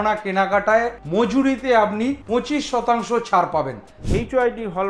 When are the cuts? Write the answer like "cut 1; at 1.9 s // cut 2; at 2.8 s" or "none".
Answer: cut 1; at 1.0 s // cut 2; at 2.2 s // cut 3; at 4.0 s